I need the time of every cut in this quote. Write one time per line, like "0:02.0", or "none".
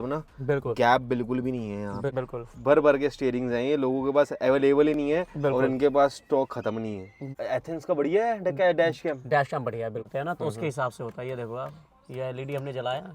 0:02.1
0:07.2
0:10.1